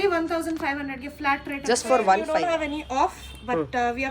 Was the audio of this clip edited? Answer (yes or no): yes